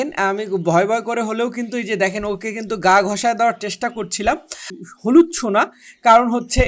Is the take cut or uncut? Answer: cut